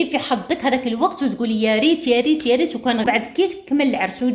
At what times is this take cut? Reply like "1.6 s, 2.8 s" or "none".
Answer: 3.1 s